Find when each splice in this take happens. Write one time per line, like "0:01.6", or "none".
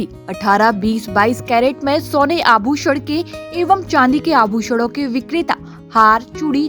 none